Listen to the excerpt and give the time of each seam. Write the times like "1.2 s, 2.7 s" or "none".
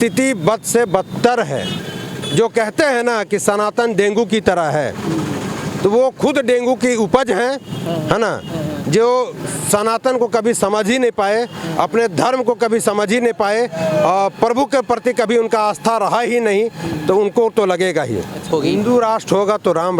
1.8 s, 18.5 s